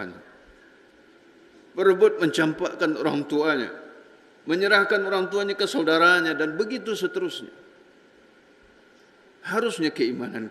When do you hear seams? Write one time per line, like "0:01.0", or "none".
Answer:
0:09.1